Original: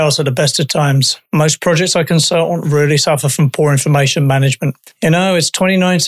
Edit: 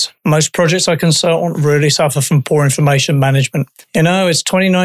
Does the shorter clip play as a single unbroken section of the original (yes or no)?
yes